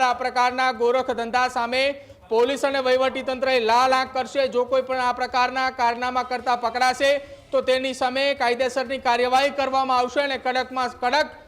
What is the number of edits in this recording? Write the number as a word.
zero